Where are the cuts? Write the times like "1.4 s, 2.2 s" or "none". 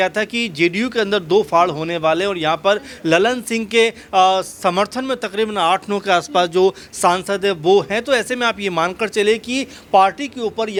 none